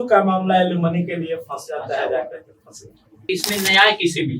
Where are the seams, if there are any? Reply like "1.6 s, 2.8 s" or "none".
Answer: 3.2 s

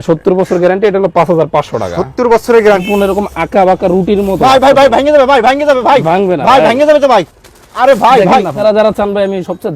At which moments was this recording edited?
2.8 s, 8.6 s

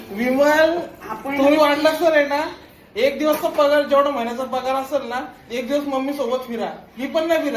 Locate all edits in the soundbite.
none

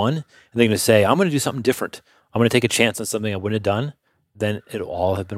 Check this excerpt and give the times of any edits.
4.4 s

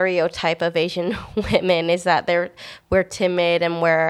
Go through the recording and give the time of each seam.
none

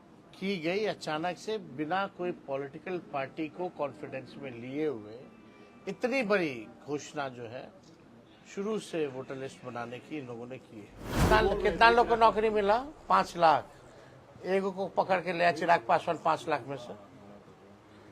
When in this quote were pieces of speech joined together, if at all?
11.2 s

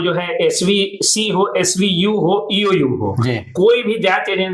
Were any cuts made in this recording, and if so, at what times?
0.9 s, 3.6 s

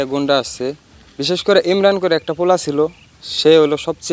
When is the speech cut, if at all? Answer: none

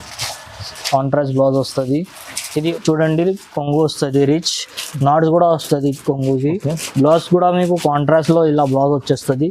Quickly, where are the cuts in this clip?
2.7 s

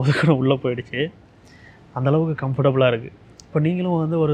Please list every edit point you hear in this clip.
none

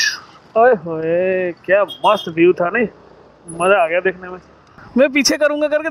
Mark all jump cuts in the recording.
4.8 s

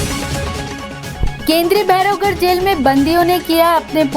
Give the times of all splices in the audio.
1.1 s

